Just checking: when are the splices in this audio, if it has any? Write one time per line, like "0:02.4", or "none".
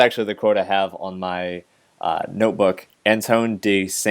0:02.9